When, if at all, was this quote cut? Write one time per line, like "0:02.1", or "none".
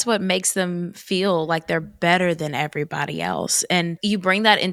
none